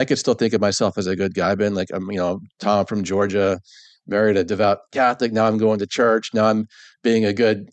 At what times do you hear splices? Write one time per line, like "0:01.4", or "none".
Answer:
none